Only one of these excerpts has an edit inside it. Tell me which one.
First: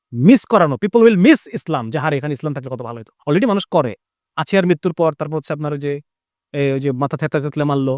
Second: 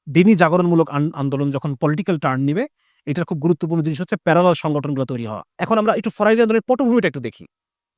second; 1 cut; at 5.6 s

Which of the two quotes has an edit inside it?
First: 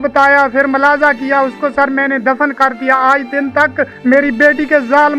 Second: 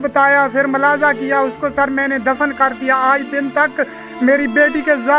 first; 1 cut; at 3.9 s

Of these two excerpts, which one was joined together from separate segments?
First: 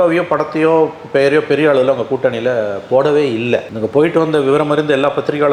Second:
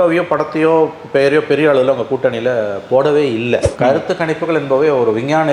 second; 1 cut; at 3.7 s

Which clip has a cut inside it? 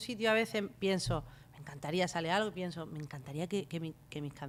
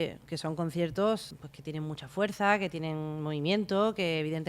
second; 1 cut; at 1.3 s

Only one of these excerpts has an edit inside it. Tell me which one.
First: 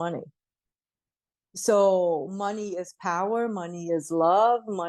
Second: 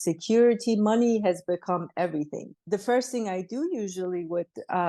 second; 1 cut; at 2.4 s

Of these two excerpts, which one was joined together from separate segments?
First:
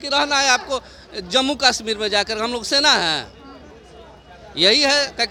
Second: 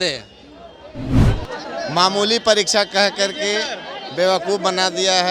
second; 1 cut; at 1.1 s

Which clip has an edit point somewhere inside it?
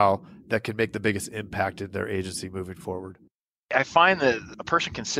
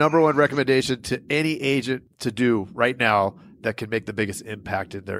first; 1 cut; at 3.6 s

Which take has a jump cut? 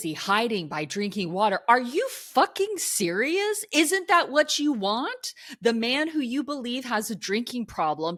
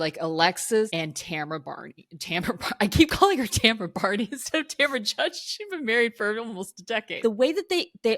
second; 2 cuts; at 0.9 s, 7.2 s

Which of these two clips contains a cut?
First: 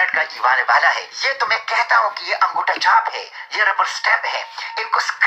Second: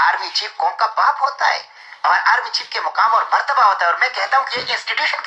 first; 1 cut; at 1.1 s

